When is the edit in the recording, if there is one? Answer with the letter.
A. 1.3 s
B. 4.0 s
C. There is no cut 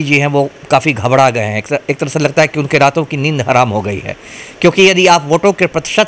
C